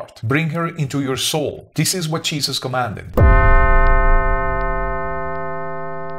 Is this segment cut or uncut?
cut